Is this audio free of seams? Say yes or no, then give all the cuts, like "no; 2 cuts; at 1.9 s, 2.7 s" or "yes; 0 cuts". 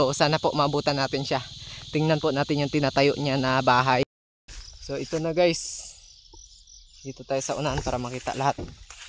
no; 1 cut; at 4.0 s